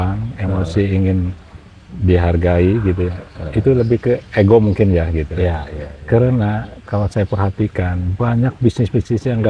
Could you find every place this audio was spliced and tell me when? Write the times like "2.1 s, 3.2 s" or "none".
none